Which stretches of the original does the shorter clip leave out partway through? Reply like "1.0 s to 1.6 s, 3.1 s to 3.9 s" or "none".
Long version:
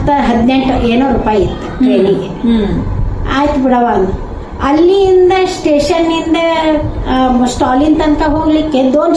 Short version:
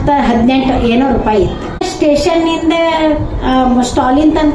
1.8 s to 5.4 s